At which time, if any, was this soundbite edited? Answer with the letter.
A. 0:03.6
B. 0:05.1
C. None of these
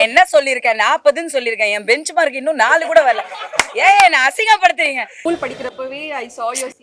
B